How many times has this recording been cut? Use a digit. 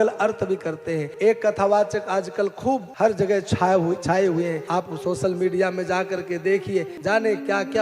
4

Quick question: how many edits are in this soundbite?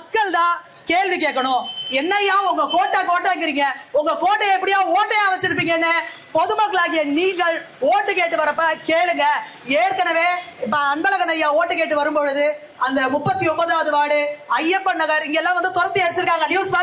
0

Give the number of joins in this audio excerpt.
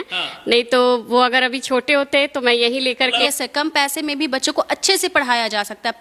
1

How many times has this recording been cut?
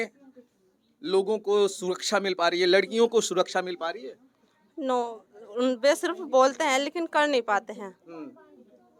0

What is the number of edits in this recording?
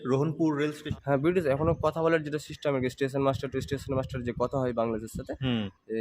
1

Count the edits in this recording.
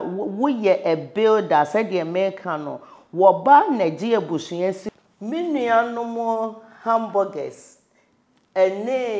1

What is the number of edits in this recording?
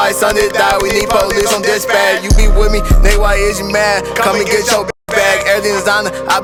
0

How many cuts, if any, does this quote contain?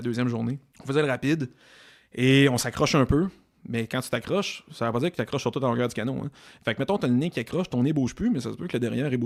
0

